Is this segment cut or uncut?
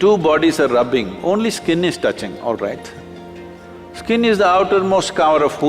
uncut